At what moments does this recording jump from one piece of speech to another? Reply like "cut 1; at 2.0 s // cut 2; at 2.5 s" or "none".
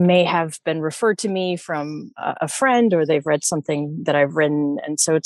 none